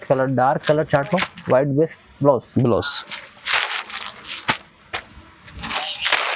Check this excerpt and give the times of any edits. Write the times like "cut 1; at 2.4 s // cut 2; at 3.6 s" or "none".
none